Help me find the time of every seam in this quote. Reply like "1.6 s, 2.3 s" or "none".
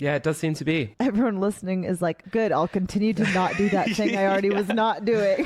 0.9 s